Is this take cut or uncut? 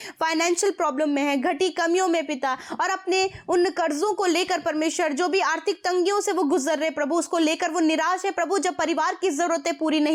uncut